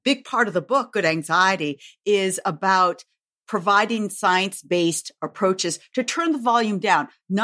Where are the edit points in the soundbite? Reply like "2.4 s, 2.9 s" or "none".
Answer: none